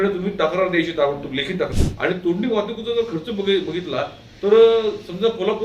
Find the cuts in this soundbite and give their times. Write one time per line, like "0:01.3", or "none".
0:01.8